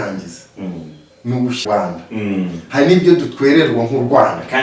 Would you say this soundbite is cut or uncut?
cut